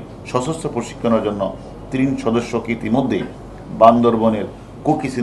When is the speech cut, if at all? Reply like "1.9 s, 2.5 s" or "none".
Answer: none